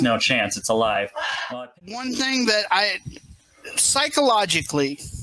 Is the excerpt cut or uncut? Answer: cut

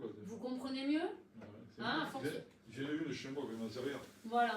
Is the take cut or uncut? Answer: cut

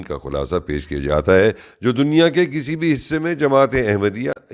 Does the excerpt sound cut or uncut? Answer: cut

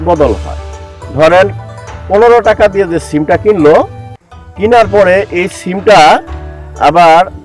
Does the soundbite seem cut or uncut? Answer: uncut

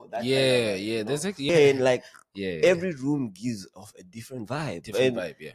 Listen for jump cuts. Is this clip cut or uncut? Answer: cut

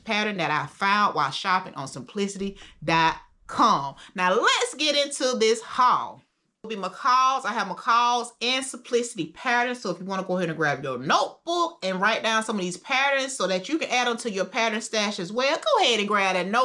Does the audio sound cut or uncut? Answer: cut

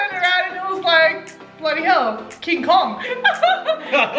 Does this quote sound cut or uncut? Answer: cut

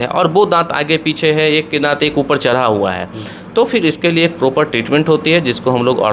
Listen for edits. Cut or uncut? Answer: uncut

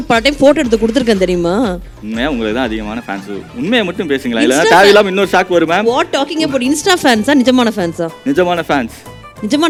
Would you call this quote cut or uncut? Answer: uncut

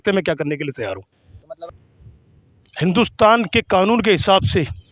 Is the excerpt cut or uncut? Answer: cut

